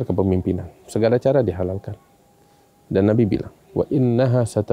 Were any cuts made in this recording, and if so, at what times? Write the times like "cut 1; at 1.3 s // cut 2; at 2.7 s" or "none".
cut 1; at 3.6 s